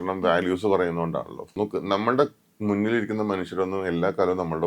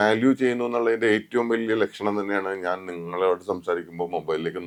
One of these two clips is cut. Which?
first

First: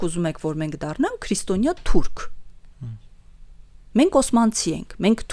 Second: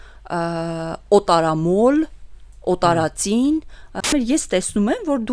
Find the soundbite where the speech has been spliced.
second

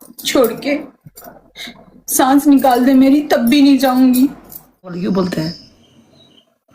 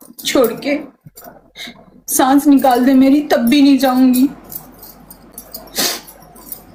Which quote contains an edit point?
first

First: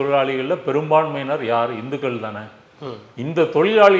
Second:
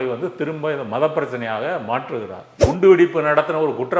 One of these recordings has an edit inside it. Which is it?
second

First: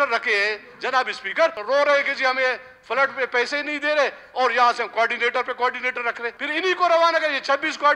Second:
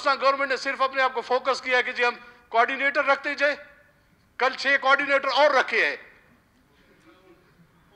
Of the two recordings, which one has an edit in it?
first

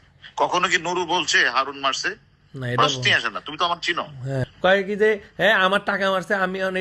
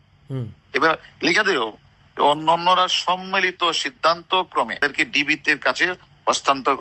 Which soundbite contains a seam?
second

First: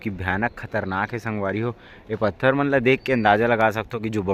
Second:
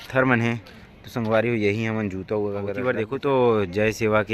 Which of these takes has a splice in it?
second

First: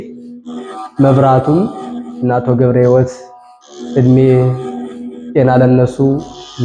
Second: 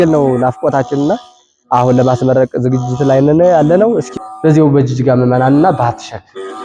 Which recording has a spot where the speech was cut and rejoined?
second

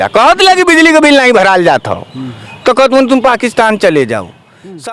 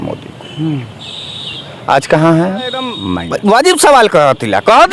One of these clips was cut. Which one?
second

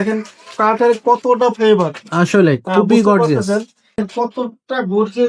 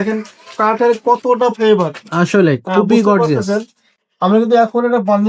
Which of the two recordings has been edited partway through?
first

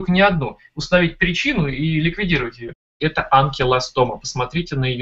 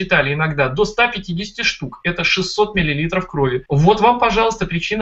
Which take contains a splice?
first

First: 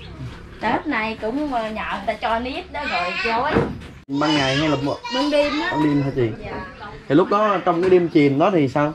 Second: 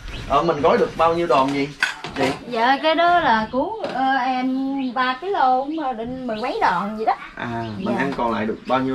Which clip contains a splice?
first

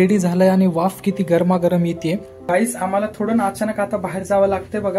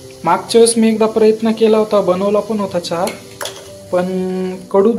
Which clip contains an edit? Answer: first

